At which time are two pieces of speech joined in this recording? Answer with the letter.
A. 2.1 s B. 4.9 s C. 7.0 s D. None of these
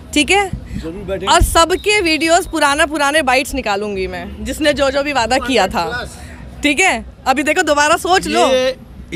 D